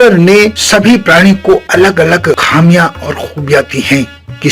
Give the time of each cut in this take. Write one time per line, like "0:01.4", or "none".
0:02.4